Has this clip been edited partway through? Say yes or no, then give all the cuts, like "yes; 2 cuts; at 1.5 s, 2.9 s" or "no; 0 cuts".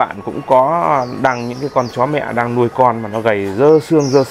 no; 0 cuts